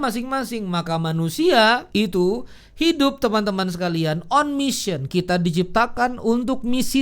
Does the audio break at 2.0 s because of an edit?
yes; 1 cut; at 2.0 s

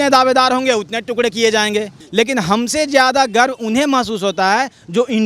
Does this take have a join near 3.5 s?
no; 1 cut; at 2.0 s

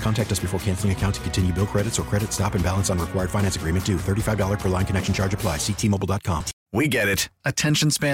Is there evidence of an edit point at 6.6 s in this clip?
yes; 1 cut; at 6.6 s

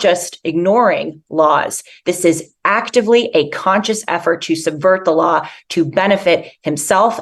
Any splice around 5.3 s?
no; 0 cuts

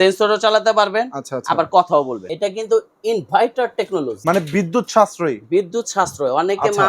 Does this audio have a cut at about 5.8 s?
no; 2 cuts; at 2.2 s, 4.1 s

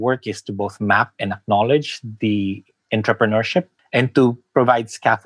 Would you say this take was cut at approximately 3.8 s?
yes; 1 cut; at 3.8 s

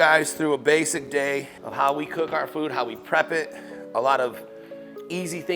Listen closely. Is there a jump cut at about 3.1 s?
no; 1 cut; at 1.6 s

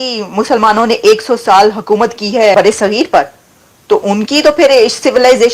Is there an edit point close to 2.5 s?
yes; 1 cut; at 2.5 s

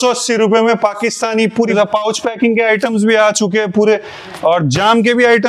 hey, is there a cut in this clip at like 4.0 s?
no; 1 cut; at 1.7 s

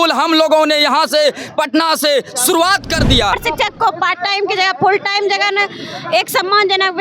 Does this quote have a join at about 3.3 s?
yes; 1 cut; at 3.3 s

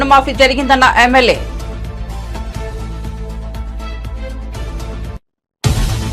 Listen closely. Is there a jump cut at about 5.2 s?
yes; 1 cut; at 5.2 s

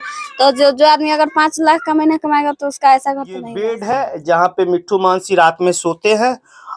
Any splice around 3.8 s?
yes; 1 cut; at 3.8 s

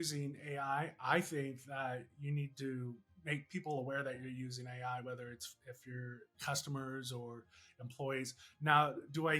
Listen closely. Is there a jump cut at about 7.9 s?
no; 2 cuts; at 3.1 s, 6.3 s

